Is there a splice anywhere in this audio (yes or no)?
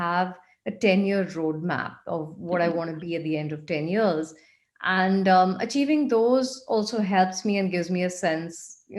no